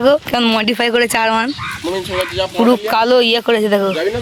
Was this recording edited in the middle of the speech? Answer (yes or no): no